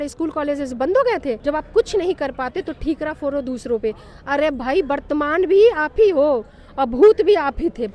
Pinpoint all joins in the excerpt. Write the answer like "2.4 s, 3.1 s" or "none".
1.4 s